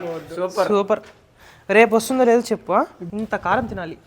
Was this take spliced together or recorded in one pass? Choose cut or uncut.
cut